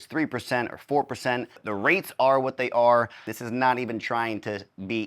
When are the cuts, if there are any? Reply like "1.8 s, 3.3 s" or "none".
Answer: 1.6 s, 3.4 s